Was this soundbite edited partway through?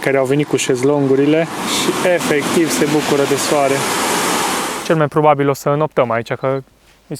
yes; 2 cuts; at 1.6 s, 4.7 s

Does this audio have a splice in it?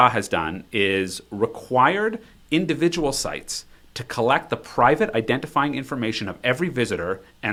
no; 0 cuts

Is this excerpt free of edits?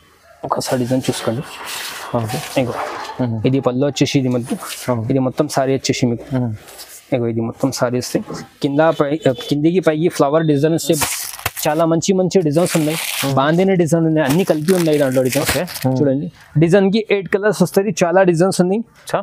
no; 1 cut; at 11.0 s

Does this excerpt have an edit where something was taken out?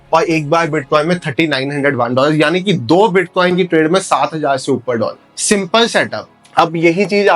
no; 0 cuts

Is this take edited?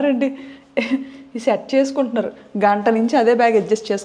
no; 0 cuts

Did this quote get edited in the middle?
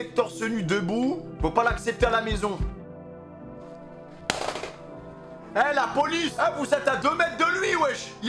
no; 0 cuts

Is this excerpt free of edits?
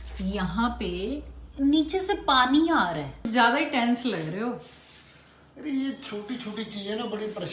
no; 1 cut; at 3.2 s

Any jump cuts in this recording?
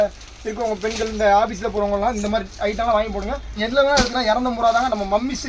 yes; 1 cut; at 3.6 s

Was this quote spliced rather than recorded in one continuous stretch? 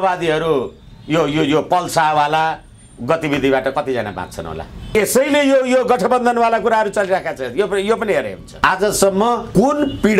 yes; 1 cut; at 8.4 s

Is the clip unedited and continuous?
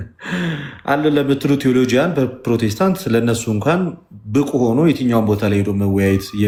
yes; 0 cuts

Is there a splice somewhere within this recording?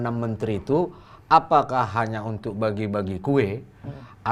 no; 0 cuts

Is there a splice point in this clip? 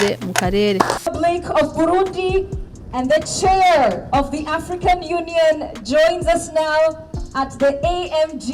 yes; 1 cut; at 1.0 s

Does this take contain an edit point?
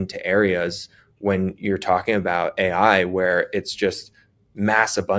no; 0 cuts

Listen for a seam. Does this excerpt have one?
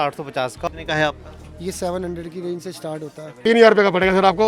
yes; 1 cut; at 3.4 s

